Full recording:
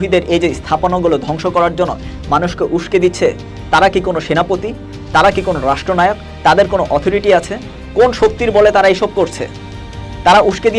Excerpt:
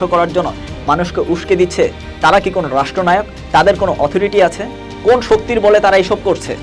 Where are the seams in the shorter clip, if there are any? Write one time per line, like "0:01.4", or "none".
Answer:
0:02.0